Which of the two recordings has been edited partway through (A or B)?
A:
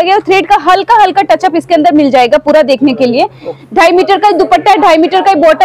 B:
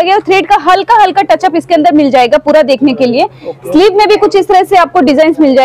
A